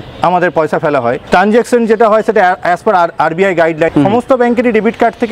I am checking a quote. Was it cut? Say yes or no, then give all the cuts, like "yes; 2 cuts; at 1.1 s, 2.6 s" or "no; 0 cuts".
yes; 2 cuts; at 1.2 s, 3.9 s